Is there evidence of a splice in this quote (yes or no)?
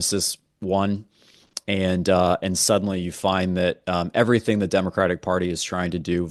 no